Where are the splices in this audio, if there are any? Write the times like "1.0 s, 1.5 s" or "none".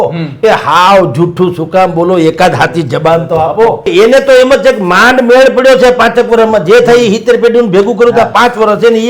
3.9 s

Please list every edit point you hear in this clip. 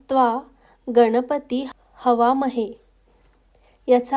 1.8 s

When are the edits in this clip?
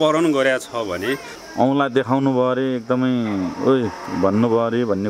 1.3 s

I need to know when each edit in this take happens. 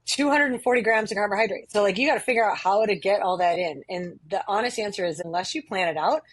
1.7 s, 5.2 s

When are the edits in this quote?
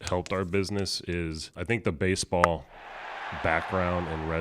1.5 s

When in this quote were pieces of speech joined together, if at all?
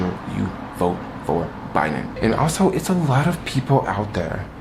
2.1 s

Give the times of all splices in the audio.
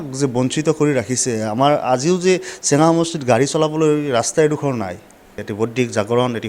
5.5 s

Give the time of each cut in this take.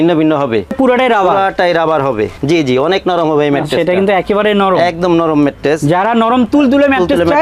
0.7 s, 2.4 s

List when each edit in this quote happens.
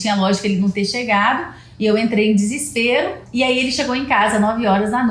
3.2 s

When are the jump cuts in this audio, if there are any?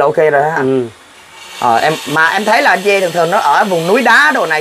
none

